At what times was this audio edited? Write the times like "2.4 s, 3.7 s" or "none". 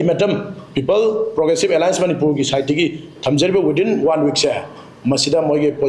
none

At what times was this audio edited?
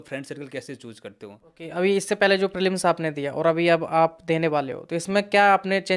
1.5 s

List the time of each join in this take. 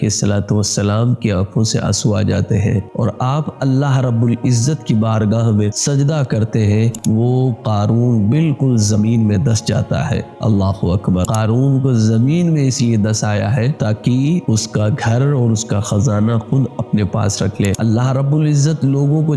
7.0 s, 11.3 s, 17.8 s

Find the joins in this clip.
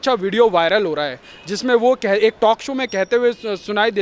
none

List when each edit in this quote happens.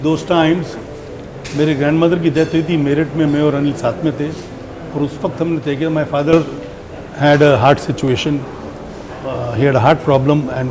none

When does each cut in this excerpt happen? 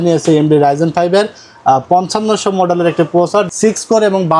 none

